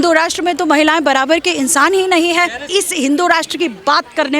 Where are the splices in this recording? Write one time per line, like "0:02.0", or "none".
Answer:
0:02.7

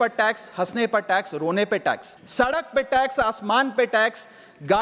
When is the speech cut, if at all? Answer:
0:02.1

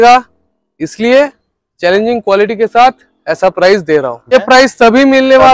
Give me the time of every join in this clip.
0:04.3

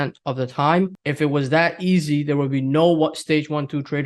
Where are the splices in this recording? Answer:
0:01.0

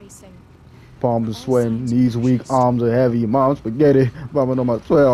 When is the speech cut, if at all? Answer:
none

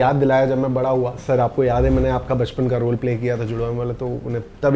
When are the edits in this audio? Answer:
0:01.2

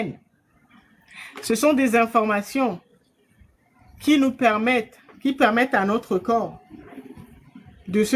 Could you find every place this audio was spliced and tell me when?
none

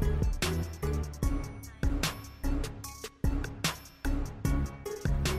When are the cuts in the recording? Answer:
0:04.5

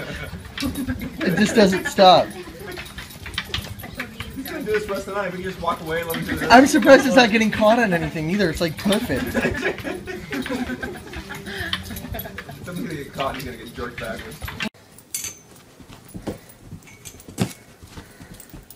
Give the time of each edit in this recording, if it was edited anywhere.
none

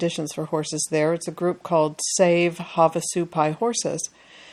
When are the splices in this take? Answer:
none

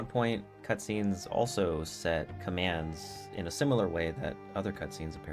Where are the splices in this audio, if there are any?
0:02.4

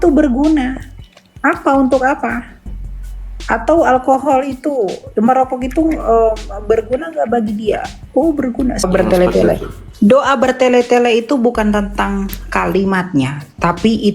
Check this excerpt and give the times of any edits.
0:08.9

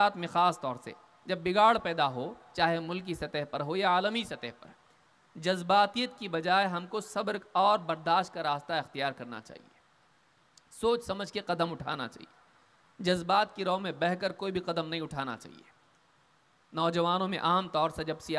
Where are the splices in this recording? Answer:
none

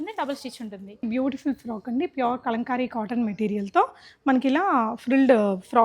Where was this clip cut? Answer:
0:01.0

